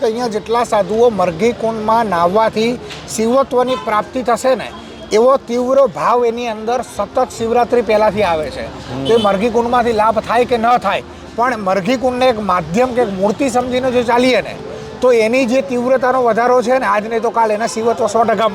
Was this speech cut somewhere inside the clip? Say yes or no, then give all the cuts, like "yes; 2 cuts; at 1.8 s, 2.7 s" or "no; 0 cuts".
no; 0 cuts